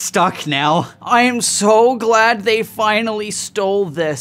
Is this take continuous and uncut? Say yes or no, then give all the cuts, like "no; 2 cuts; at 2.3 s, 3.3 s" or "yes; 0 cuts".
no; 1 cut; at 1.0 s